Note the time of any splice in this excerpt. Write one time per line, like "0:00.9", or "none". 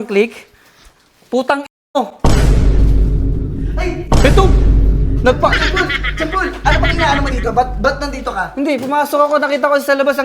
0:06.6